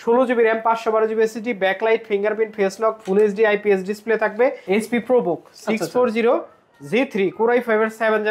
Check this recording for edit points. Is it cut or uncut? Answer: cut